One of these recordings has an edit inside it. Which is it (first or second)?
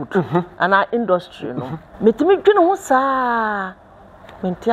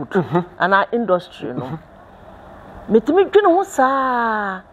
first